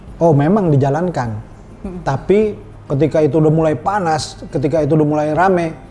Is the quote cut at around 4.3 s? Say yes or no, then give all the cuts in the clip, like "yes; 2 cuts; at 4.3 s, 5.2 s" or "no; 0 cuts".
no; 1 cut; at 2.7 s